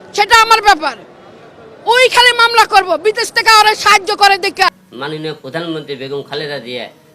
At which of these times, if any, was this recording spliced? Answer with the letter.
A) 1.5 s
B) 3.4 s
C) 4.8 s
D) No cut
C